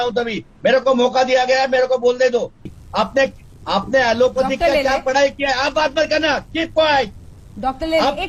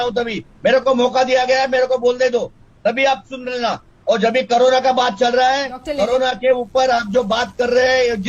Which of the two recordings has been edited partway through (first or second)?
first